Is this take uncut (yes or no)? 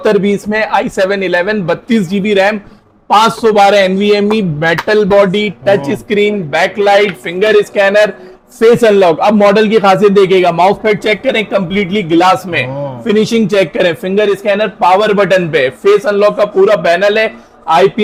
yes